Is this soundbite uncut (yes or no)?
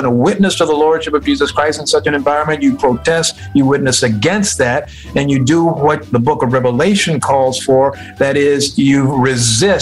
yes